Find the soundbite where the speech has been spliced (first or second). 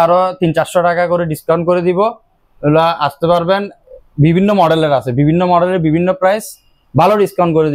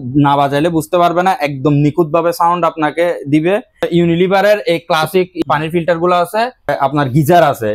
second